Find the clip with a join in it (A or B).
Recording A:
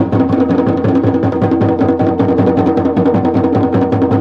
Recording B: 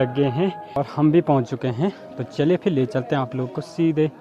B